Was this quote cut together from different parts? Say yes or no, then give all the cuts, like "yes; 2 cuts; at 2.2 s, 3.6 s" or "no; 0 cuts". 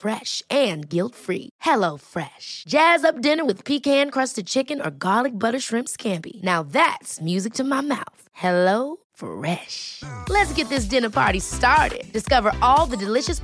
no; 0 cuts